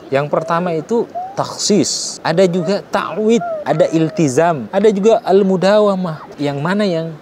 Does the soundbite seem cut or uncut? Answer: cut